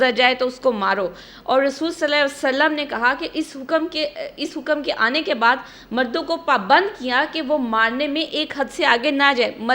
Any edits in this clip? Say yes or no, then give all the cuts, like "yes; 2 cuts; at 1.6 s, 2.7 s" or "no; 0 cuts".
no; 0 cuts